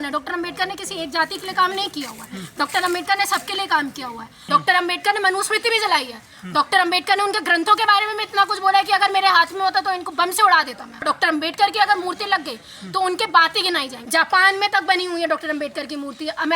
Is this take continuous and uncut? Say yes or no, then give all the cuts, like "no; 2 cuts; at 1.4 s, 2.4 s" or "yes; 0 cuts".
no; 3 cuts; at 4.3 s, 11.0 s, 13.9 s